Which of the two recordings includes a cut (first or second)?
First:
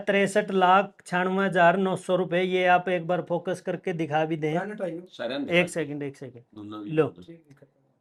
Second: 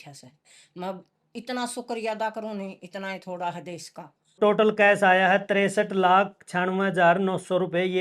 second